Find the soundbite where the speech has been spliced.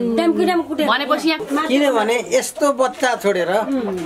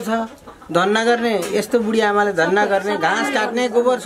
first; 1 cut; at 1.4 s

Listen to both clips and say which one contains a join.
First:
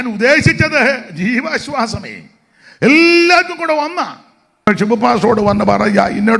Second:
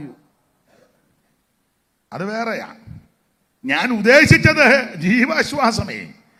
first; 1 cut; at 4.7 s

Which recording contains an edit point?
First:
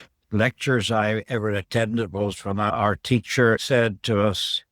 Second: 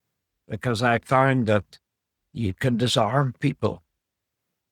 first; 2 cuts; at 2.7 s, 3.6 s

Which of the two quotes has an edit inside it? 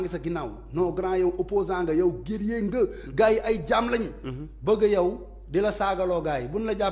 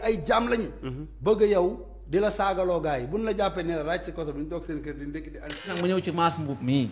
second; 1 cut; at 5.7 s

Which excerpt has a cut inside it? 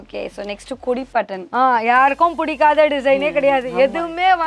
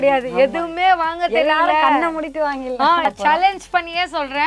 second; 1 cut; at 3.0 s

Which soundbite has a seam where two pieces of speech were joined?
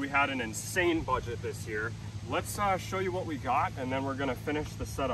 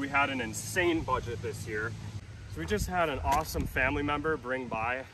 second; 1 cut; at 2.1 s

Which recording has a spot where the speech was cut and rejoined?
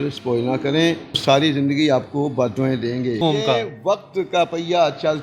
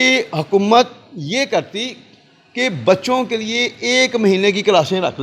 first; 2 cuts; at 1.2 s, 3.2 s

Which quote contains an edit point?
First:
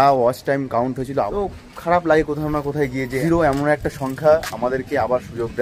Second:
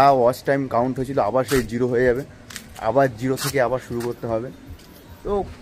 first; 2 cuts; at 1.3 s, 3.1 s

